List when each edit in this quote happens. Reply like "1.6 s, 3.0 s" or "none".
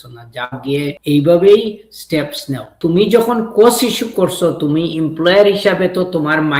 1.0 s, 2.7 s